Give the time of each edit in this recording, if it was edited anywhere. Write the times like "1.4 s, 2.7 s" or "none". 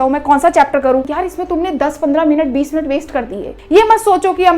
1.2 s, 3.5 s